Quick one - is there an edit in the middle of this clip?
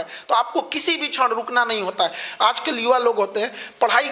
no; 0 cuts

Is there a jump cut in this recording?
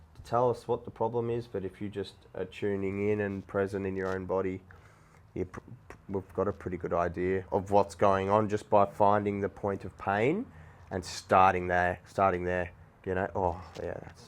yes; 1 cut; at 7.5 s

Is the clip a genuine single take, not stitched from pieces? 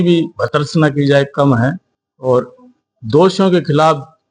yes; 0 cuts

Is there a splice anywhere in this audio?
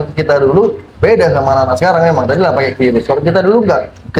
no; 0 cuts

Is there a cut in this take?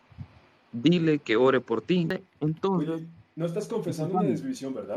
yes; 1 cut; at 2.2 s

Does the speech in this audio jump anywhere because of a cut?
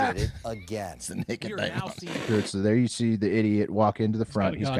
yes; 1 cut; at 2.2 s

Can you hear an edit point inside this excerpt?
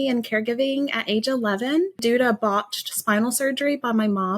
yes; 1 cut; at 2.0 s

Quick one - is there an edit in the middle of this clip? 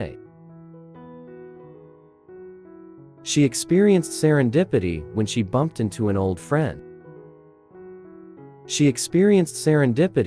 no; 0 cuts

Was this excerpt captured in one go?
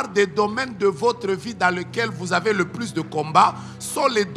yes; 0 cuts

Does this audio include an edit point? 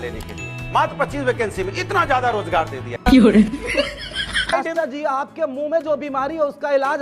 yes; 2 cuts; at 2.9 s, 4.5 s

